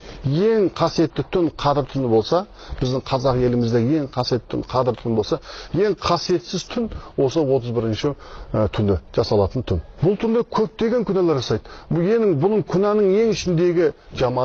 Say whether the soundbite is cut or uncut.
cut